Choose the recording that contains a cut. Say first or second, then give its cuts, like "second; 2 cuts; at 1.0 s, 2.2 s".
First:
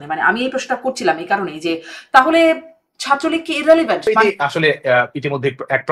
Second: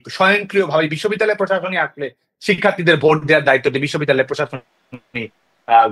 first; 1 cut; at 4.1 s